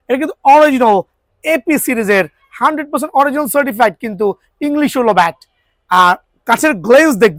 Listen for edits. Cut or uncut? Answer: uncut